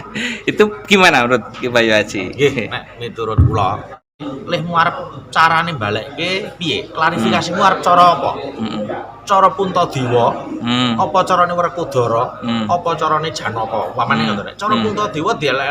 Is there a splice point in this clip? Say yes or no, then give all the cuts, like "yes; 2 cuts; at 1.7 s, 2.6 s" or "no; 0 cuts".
yes; 1 cut; at 4.1 s